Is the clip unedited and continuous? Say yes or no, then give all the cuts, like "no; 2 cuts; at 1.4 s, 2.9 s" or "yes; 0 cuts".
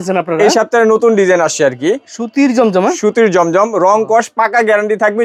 yes; 0 cuts